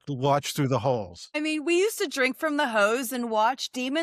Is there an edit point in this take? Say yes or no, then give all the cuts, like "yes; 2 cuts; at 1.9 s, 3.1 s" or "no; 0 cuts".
yes; 1 cut; at 1.2 s